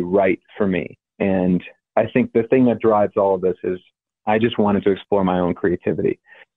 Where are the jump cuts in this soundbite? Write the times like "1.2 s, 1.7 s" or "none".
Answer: 1.0 s, 1.8 s